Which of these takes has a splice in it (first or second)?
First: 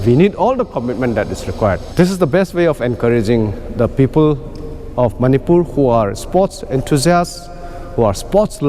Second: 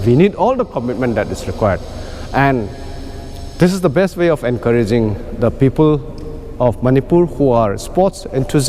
first